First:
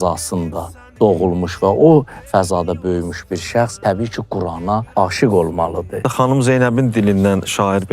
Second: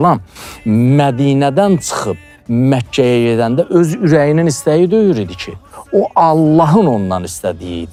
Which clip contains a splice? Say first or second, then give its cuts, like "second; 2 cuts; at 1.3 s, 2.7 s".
first; 3 cuts; at 3.7 s, 4.9 s, 6.0 s